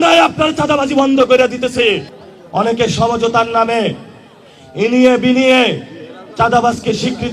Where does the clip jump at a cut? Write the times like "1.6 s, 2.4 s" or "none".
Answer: 2.1 s